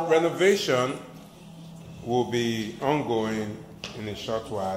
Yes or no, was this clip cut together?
no